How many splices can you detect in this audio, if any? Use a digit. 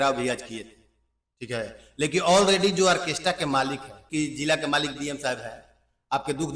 1